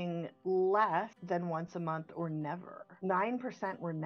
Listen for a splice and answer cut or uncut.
cut